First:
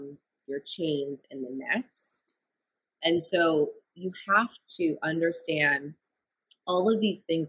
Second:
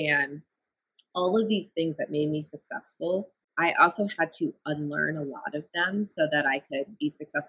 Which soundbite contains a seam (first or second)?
second